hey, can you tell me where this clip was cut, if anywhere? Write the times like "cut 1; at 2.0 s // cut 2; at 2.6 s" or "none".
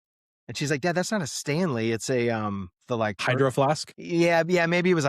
cut 1; at 3.2 s // cut 2; at 3.9 s